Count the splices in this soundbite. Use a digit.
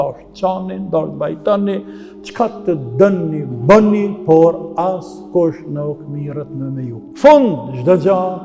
1